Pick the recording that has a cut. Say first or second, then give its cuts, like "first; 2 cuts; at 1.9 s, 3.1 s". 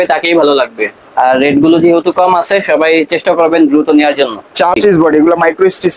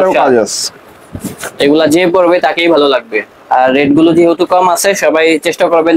first; 1 cut; at 4.8 s